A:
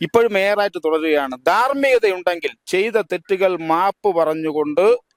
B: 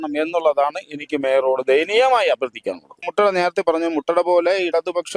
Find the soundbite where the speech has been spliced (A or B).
B